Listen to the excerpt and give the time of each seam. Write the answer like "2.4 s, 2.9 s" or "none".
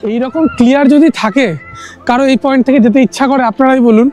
none